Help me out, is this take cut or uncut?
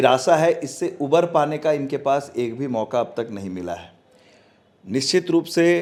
uncut